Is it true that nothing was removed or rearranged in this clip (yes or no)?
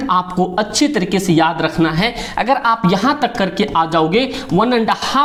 yes